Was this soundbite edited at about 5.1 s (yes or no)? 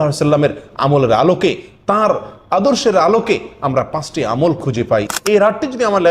yes